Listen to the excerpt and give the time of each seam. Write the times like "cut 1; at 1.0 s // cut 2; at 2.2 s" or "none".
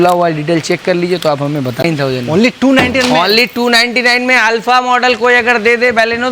cut 1; at 1.8 s